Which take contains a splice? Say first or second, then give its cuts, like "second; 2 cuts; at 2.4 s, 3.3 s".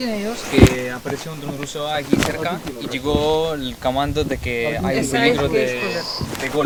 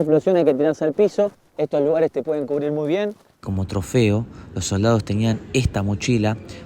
second; 2 cuts; at 1.4 s, 3.3 s